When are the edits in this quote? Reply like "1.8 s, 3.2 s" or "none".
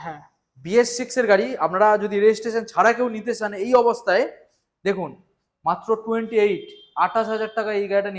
none